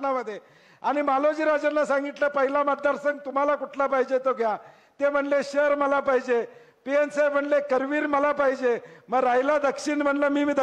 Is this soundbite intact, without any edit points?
yes; 0 cuts

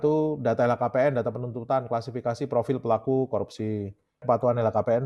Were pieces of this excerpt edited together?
no; 0 cuts

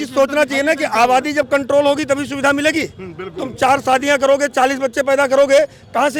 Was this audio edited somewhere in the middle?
no; 0 cuts

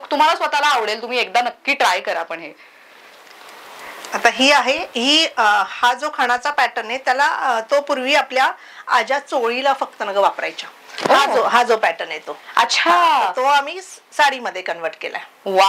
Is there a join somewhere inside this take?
no; 0 cuts

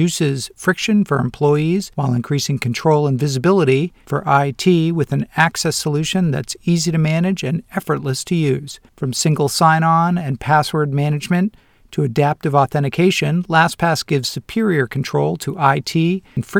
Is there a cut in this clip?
no; 0 cuts

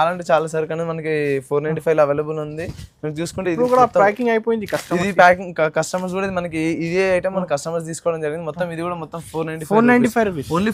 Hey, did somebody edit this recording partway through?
no; 0 cuts

